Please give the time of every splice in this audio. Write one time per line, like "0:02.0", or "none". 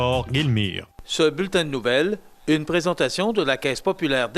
0:00.9